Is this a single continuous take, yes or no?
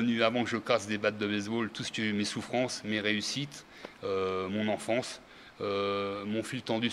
yes